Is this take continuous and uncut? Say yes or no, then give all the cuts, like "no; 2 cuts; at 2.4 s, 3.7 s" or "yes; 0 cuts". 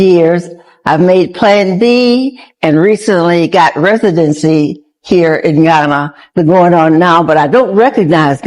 no; 1 cut; at 6.3 s